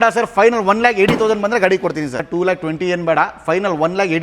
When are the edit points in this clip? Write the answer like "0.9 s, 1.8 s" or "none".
2.2 s